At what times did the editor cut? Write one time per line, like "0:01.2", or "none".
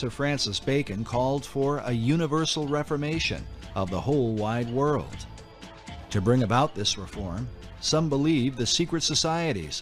none